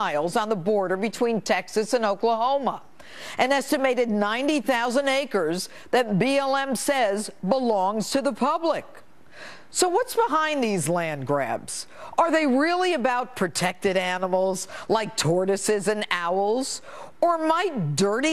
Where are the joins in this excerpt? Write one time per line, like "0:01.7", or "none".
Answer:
none